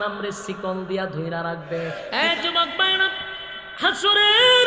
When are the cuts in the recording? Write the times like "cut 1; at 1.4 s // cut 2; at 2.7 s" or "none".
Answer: cut 1; at 2.0 s